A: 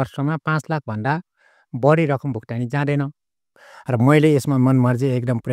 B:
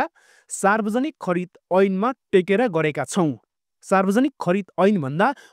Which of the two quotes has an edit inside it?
A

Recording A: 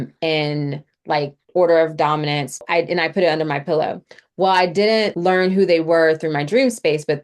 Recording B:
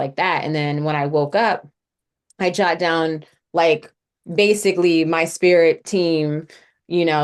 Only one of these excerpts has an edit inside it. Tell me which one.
A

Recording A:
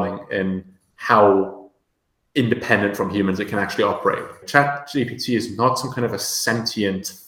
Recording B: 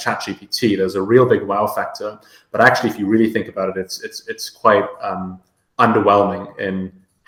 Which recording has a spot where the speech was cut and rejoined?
A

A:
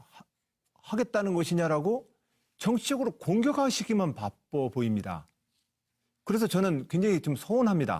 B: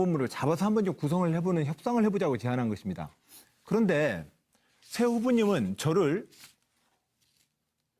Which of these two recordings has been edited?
B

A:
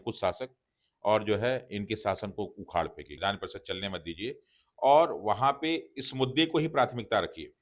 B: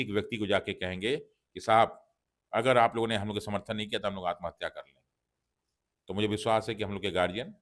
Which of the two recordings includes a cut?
A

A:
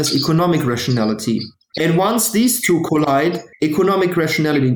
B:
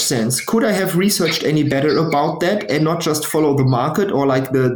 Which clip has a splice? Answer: A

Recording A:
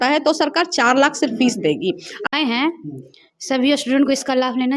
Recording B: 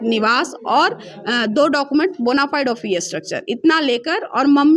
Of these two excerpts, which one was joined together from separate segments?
A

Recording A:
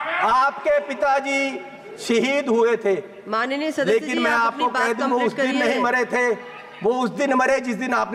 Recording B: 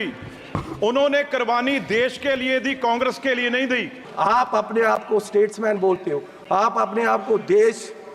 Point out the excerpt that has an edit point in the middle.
B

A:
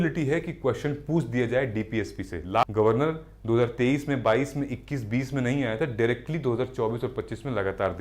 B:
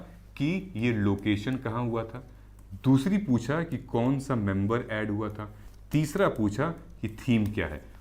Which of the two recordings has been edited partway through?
A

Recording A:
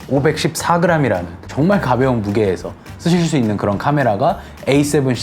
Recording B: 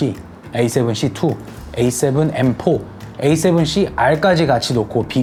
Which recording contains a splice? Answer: A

